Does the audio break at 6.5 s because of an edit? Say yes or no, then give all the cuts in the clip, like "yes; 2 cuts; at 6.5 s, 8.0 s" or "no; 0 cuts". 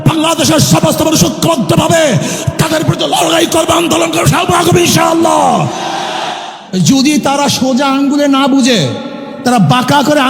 yes; 1 cut; at 6.5 s